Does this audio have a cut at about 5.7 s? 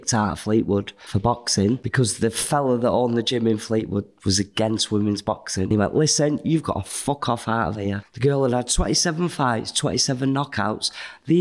yes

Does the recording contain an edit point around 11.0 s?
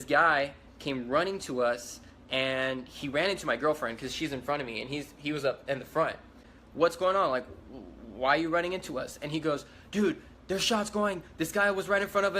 no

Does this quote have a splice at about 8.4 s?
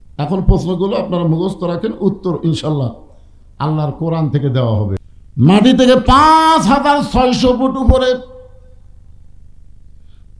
no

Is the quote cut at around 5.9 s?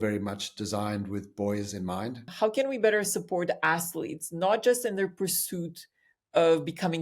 no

